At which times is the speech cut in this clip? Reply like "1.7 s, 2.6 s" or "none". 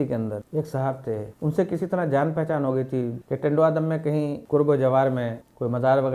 3.2 s